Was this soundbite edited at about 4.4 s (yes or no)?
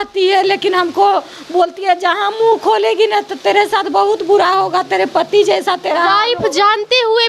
no